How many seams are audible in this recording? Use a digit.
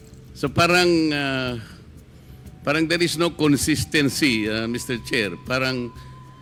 0